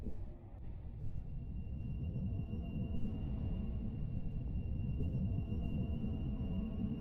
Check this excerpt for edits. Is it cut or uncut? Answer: uncut